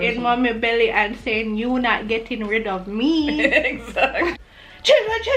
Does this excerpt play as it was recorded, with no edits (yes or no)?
no